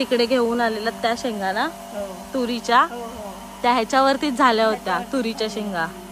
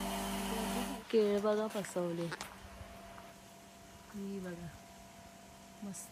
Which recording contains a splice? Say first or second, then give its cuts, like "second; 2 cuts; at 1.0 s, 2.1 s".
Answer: second; 1 cut; at 0.9 s